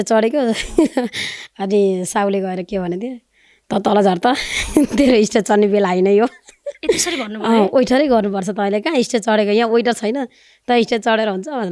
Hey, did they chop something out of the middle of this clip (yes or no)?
no